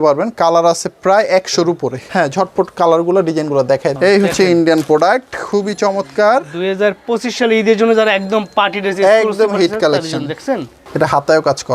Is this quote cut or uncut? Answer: cut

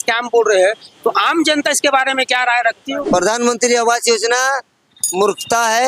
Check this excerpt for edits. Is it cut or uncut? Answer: cut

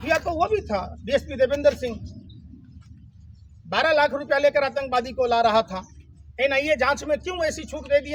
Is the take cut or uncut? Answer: uncut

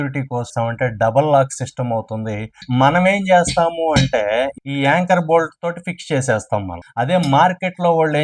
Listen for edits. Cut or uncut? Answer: cut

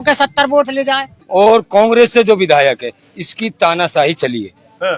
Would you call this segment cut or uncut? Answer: cut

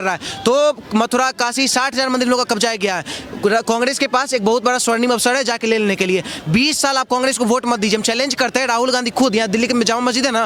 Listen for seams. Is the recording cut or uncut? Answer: uncut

